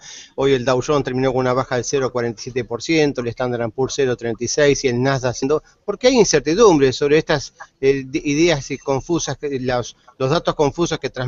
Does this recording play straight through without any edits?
yes; 0 cuts

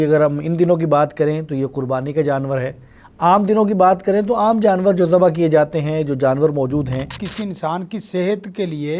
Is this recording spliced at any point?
yes; 1 cut; at 7.3 s

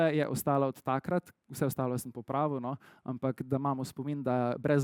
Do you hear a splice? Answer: no; 0 cuts

